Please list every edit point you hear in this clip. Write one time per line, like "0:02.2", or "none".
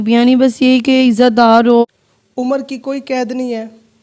0:01.8